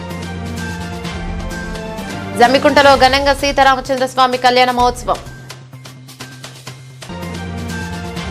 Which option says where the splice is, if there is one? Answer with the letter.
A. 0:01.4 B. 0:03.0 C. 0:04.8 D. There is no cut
D